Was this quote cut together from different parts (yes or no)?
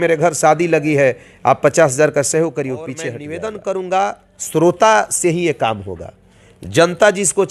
yes